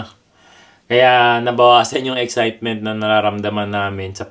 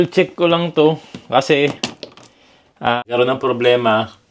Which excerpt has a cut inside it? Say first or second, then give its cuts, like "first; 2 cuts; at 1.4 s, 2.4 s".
second; 1 cut; at 3.0 s